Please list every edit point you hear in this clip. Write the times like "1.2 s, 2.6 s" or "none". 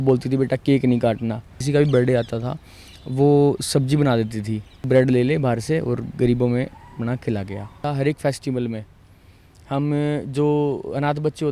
1.6 s, 4.8 s, 7.8 s